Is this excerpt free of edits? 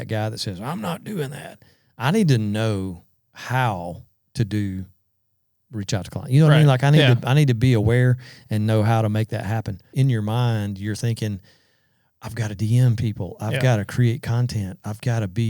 no; 1 cut; at 9.8 s

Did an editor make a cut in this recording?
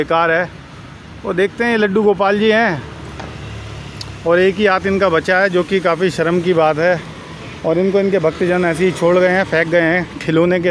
no; 0 cuts

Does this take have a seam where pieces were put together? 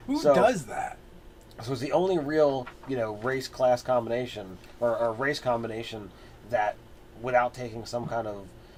no; 0 cuts

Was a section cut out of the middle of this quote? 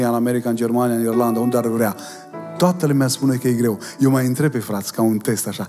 no; 0 cuts

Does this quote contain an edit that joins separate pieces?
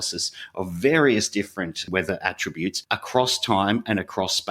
yes; 2 cuts; at 1.8 s, 2.8 s

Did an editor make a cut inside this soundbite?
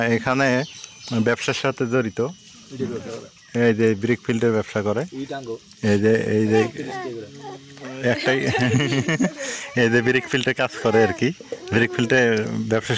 no; 0 cuts

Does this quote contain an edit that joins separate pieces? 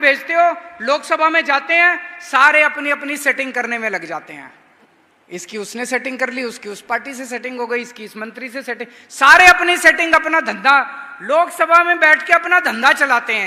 no; 0 cuts

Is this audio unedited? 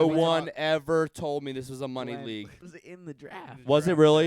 no; 1 cut; at 2.6 s

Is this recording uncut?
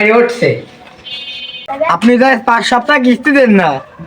no; 1 cut; at 1.6 s

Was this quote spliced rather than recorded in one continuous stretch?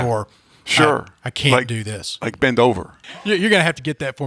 yes; 1 cut; at 3.3 s

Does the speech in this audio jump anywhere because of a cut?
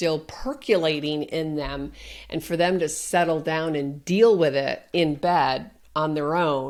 no; 0 cuts

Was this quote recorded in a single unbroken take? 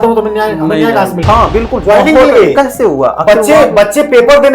no; 1 cut; at 1.2 s

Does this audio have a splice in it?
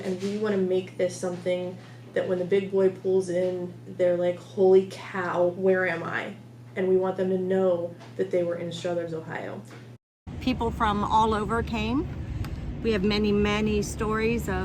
yes; 1 cut; at 10.0 s

